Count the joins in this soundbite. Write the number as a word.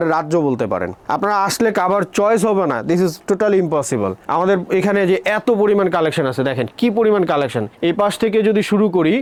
zero